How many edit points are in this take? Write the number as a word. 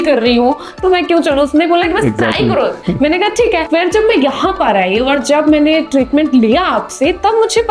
zero